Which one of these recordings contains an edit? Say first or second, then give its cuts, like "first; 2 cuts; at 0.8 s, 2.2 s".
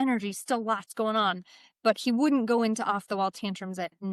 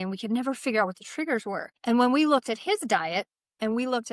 second; 1 cut; at 1.7 s